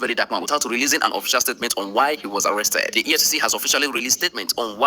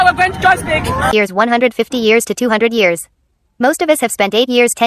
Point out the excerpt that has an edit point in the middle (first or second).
second